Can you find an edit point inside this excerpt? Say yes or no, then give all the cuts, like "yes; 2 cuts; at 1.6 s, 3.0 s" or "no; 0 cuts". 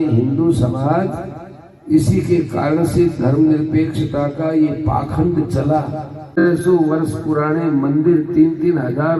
yes; 1 cut; at 6.4 s